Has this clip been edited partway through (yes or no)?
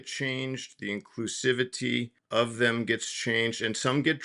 yes